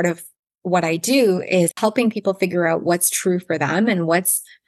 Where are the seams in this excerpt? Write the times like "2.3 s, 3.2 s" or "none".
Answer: 1.7 s